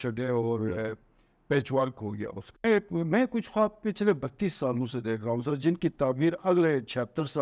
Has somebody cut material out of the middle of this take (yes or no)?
yes